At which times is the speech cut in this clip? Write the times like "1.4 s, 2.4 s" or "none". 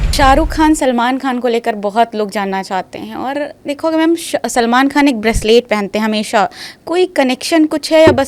none